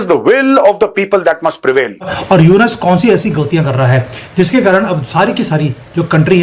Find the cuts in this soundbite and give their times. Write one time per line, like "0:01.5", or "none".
0:02.2